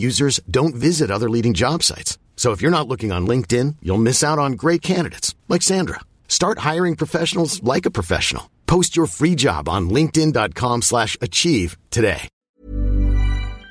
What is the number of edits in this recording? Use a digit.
1